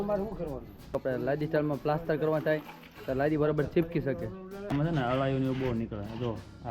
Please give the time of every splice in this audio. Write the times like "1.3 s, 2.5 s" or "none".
1.0 s, 4.7 s